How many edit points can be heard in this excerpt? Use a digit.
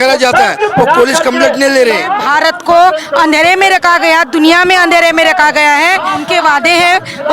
2